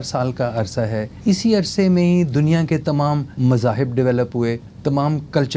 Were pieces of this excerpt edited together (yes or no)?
yes